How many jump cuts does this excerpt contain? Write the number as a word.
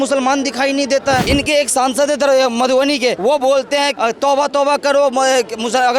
three